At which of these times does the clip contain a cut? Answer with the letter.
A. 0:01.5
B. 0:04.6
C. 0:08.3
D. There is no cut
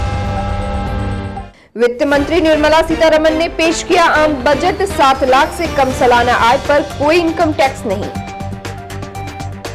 A